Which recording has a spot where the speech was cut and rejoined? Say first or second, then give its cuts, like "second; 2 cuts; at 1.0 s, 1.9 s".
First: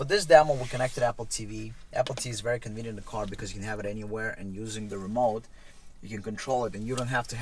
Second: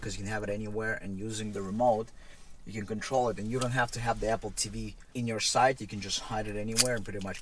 second; 1 cut; at 5.0 s